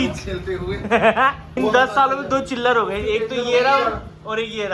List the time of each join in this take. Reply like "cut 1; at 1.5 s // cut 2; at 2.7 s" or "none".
cut 1; at 1.6 s